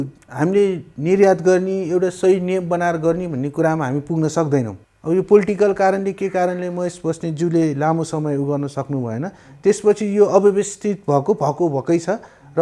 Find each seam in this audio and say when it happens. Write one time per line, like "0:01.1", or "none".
0:04.9